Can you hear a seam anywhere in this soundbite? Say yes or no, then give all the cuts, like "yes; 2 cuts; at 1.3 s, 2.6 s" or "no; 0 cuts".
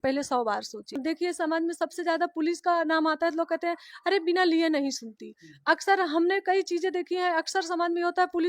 yes; 1 cut; at 1.0 s